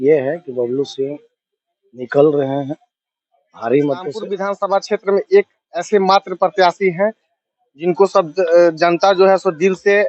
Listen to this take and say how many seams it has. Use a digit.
1